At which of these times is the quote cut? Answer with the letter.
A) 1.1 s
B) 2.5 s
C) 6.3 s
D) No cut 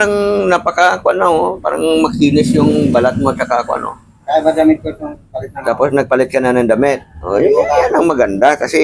D